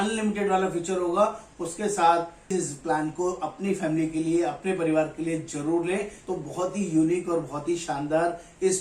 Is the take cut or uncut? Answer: cut